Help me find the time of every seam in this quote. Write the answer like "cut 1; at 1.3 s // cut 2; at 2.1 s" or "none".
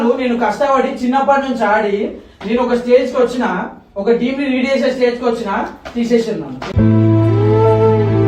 none